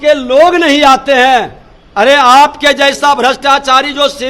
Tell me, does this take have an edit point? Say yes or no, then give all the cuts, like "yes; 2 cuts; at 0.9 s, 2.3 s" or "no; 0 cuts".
no; 0 cuts